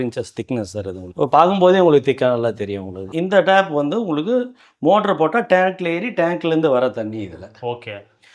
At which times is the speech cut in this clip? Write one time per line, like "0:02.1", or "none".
0:01.0
0:03.1

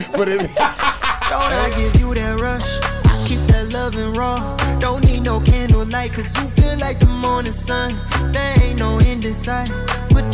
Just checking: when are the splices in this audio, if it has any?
0:01.3

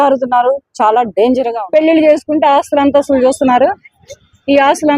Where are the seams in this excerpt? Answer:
0:01.6

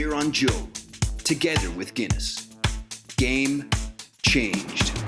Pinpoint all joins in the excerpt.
none

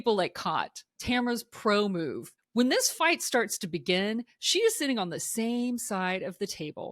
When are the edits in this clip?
0:01.0
0:02.3

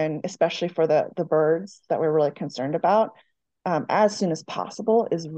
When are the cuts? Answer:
none

